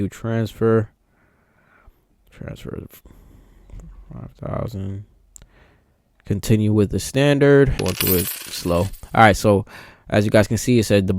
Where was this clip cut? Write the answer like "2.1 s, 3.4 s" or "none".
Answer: 7.8 s